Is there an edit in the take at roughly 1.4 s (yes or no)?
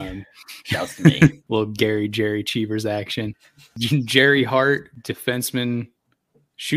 yes